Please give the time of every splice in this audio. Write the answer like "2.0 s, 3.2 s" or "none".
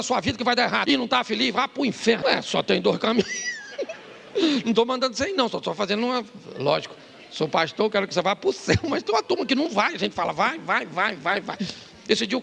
0.8 s, 2.2 s